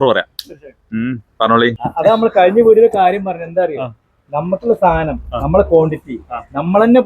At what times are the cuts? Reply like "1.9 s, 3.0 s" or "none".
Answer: 1.8 s